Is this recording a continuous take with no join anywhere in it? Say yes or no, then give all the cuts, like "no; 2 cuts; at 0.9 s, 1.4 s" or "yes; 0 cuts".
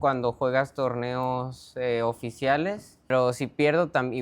no; 1 cut; at 3.1 s